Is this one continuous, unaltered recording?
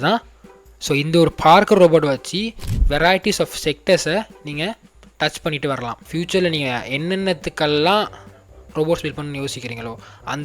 no; 1 cut; at 6.1 s

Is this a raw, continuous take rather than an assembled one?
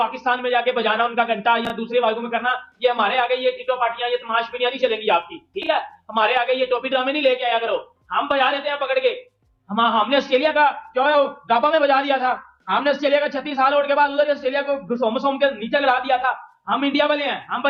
yes; 0 cuts

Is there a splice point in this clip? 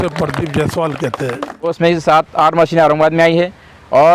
yes; 1 cut; at 1.7 s

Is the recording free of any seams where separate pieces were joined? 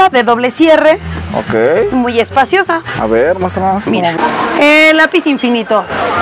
no; 1 cut; at 4.2 s

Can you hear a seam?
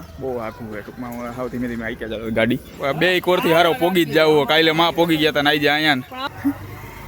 yes; 2 cuts; at 2.8 s, 6.2 s

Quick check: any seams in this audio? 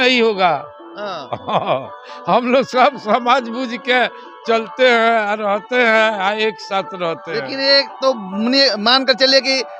no; 0 cuts

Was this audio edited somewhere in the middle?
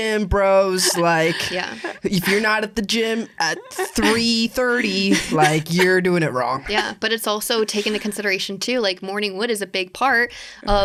no; 0 cuts

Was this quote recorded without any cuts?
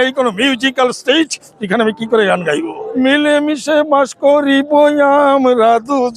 no; 1 cut; at 2.8 s

